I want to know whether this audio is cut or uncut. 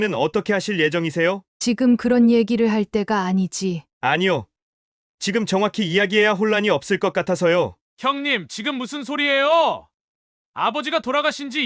cut